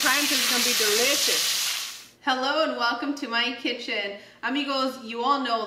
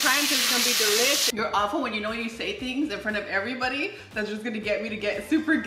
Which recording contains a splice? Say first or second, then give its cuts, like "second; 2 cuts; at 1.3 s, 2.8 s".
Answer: second; 1 cut; at 1.3 s